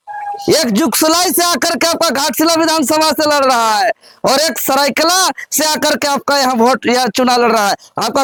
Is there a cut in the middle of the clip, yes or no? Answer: no